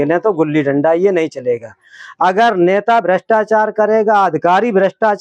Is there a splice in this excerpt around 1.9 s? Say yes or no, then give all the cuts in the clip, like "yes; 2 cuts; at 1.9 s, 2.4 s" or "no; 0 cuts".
no; 0 cuts